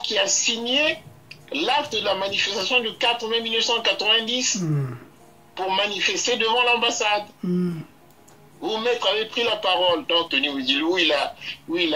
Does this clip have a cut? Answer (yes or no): yes